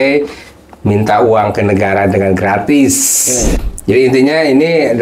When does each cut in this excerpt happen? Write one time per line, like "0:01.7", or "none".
0:03.5